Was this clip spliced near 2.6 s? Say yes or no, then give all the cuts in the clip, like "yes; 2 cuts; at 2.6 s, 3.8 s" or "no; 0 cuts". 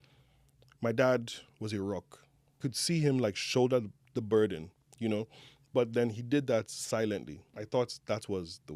yes; 2 cuts; at 2.6 s, 7.6 s